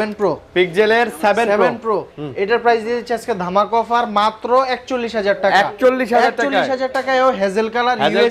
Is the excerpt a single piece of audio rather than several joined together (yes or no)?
yes